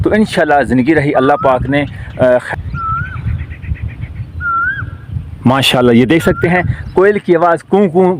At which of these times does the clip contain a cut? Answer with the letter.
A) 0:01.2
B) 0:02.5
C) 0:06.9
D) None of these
B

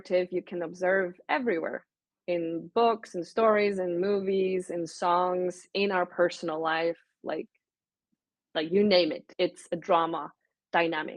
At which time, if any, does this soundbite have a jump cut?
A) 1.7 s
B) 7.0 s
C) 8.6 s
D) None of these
D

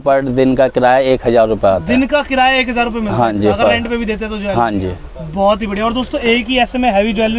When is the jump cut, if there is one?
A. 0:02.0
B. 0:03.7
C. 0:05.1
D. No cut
D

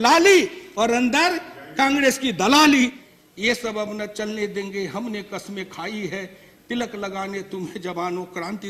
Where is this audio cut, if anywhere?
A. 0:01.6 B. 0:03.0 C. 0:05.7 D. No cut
B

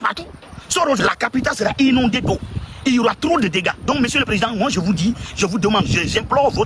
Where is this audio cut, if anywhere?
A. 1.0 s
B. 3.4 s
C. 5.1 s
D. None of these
A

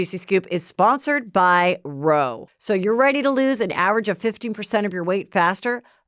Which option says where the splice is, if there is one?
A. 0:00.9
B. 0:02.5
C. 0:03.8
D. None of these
B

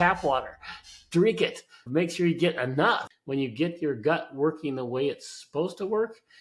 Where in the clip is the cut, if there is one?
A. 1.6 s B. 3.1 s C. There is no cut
B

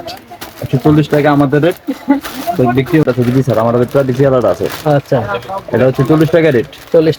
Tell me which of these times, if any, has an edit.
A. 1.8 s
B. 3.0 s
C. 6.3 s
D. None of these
B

